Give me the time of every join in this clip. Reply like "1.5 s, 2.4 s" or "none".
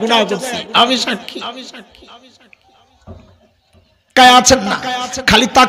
4.1 s